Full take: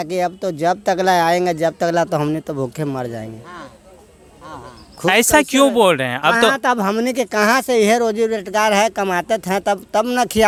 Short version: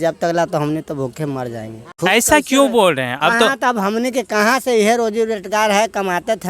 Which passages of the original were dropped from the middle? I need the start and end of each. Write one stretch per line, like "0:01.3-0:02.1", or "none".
0:03.4-0:04.8